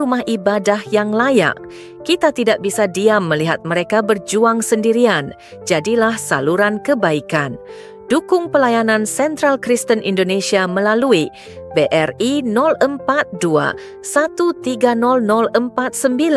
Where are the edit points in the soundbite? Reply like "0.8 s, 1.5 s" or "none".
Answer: none